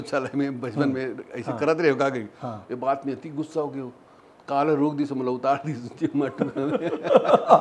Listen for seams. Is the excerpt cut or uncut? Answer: uncut